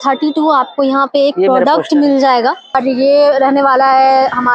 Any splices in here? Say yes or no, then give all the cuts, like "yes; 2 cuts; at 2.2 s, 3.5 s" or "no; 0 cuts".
yes; 1 cut; at 2.8 s